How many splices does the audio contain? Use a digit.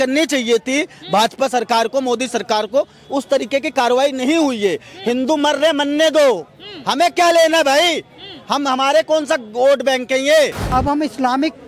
1